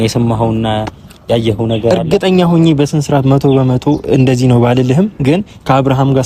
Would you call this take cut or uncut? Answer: uncut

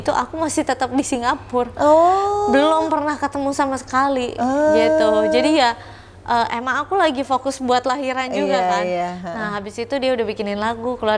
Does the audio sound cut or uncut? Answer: uncut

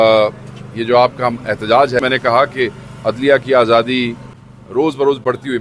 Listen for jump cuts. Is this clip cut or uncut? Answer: cut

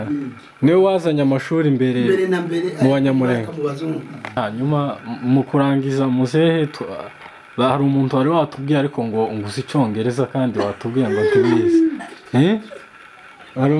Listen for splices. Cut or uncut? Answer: cut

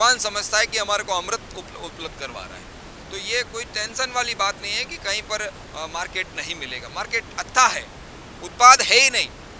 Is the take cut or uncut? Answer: uncut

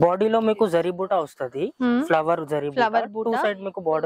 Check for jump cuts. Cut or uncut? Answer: uncut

